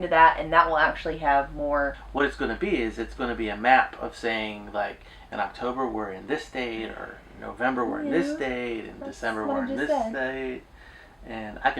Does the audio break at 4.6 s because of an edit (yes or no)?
no